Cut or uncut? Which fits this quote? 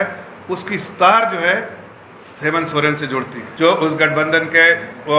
cut